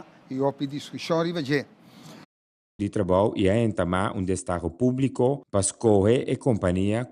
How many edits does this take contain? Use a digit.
1